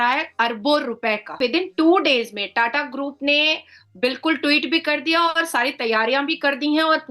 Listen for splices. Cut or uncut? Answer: cut